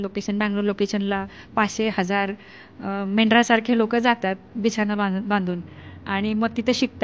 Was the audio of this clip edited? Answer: no; 0 cuts

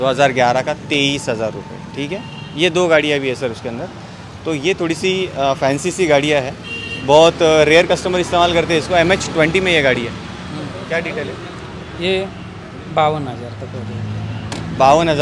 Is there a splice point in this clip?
no; 0 cuts

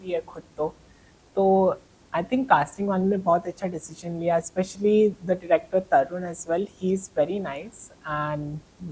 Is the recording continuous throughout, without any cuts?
yes; 0 cuts

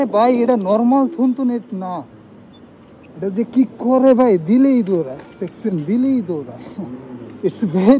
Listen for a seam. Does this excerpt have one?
no; 0 cuts

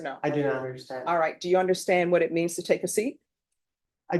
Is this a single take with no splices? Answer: yes; 0 cuts

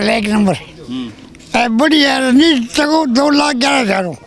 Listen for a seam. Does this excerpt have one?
no; 0 cuts

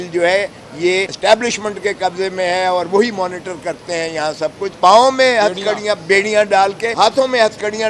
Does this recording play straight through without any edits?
no; 3 cuts; at 1.1 s, 4.7 s, 6.9 s

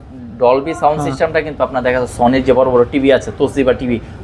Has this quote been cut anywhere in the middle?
no; 0 cuts

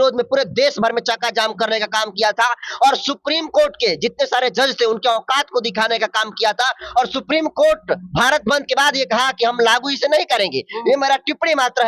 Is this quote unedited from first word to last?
yes; 0 cuts

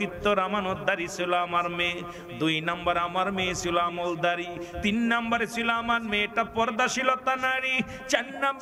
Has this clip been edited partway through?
no; 0 cuts

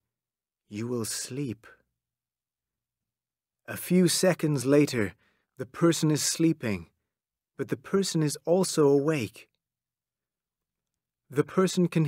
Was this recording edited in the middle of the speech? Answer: no; 0 cuts

